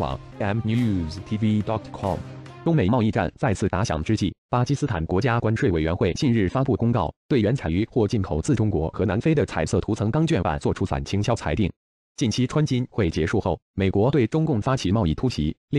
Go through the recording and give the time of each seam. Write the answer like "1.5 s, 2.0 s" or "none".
2.4 s